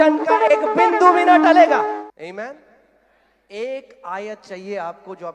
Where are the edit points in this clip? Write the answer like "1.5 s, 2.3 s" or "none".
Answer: 2.0 s